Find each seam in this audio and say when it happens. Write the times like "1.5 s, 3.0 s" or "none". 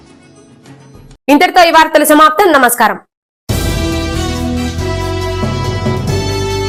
none

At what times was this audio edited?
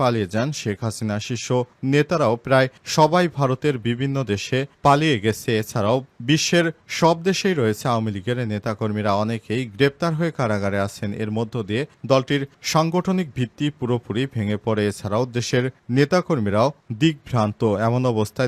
none

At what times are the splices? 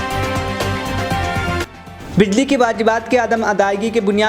1.6 s

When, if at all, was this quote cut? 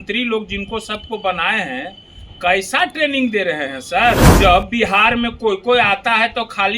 4.3 s

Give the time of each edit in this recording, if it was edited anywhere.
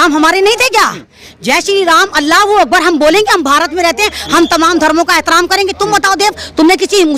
none

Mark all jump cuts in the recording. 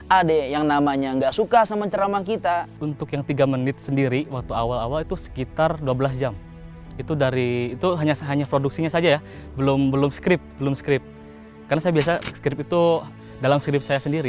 2.7 s

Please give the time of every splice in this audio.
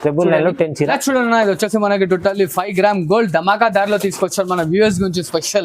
0.9 s

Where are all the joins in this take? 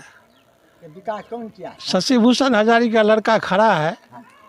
1.8 s

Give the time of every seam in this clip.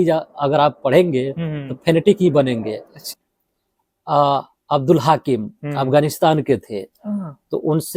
3.1 s

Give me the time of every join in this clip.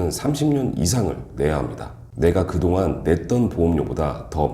2.0 s

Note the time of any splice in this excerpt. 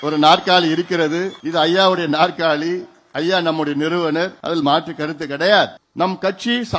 1.4 s, 4.4 s, 5.8 s

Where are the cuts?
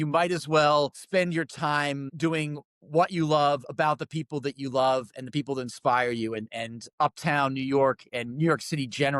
1.0 s, 2.1 s

